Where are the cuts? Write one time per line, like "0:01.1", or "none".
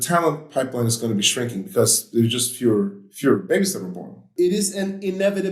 0:04.2